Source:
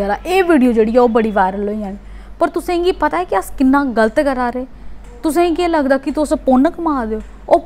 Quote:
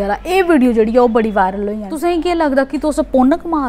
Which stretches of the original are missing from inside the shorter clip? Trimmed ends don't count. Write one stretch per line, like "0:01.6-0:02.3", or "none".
0:01.9-0:05.2